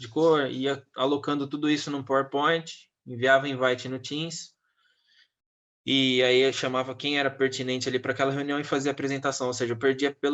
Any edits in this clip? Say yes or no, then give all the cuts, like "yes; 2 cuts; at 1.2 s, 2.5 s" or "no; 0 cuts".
no; 0 cuts